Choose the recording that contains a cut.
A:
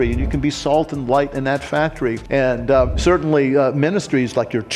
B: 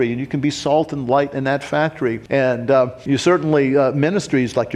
A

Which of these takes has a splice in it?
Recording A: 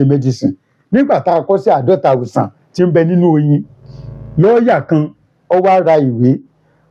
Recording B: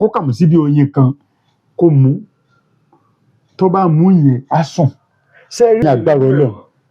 B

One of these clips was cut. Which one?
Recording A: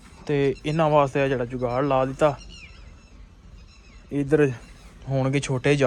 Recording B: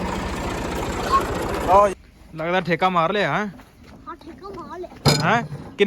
B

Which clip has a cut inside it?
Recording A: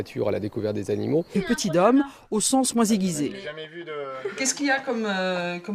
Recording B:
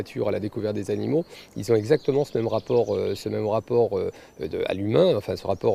B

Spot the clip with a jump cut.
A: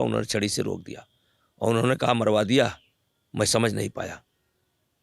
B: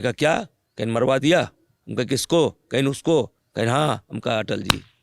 B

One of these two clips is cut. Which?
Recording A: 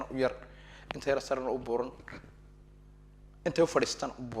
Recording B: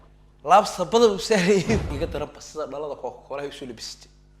B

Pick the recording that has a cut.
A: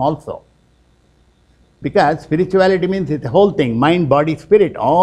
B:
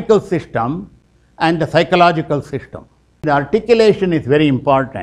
B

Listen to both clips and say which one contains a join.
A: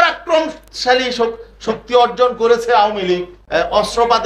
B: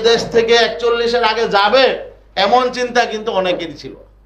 A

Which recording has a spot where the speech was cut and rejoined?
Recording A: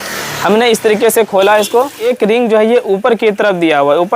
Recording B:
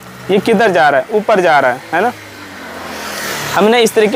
A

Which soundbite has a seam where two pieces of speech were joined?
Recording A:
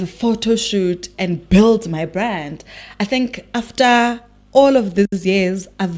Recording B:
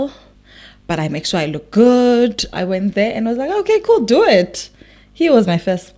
B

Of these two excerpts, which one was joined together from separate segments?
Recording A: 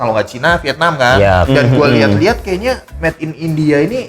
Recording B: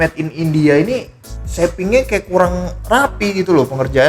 A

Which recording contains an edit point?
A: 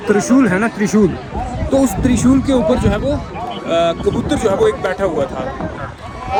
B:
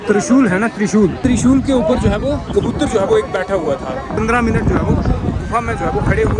B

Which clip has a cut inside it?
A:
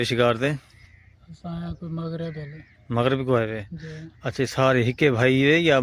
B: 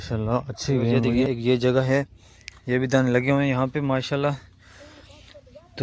B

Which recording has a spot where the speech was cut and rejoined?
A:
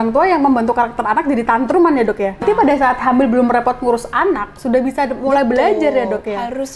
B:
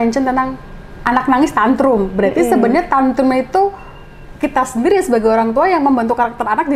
A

